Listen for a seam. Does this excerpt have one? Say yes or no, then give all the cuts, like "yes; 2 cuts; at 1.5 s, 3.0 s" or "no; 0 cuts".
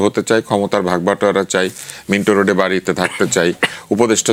no; 0 cuts